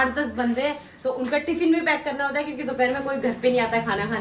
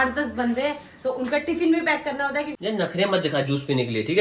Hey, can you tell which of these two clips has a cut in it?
second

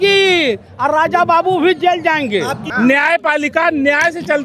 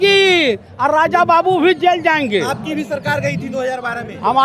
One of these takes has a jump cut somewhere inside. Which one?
first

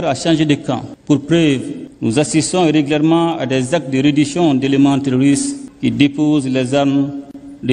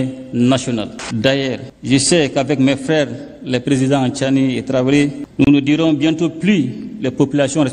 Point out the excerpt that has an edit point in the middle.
second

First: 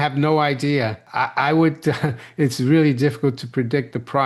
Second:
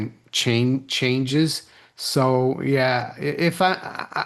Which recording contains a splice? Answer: first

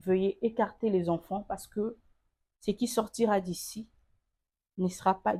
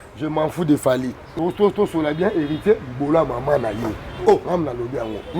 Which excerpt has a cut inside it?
second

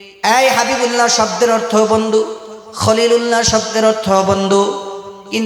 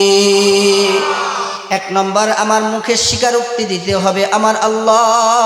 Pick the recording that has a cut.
second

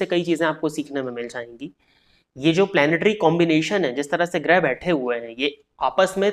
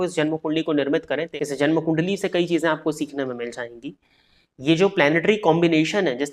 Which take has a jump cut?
second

